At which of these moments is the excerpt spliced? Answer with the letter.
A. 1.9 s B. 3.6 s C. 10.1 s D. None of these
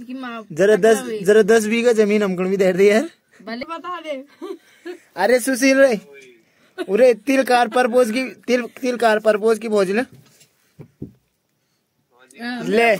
B